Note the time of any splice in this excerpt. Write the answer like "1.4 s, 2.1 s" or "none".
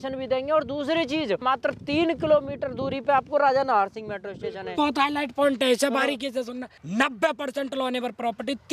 1.4 s, 4.8 s